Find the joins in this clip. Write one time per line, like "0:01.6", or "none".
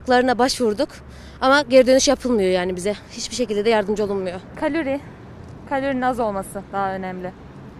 0:04.5